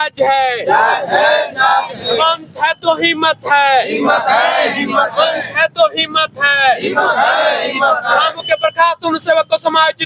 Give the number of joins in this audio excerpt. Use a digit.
0